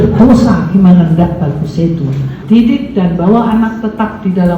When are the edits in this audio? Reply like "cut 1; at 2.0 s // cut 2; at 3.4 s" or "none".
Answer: cut 1; at 2.3 s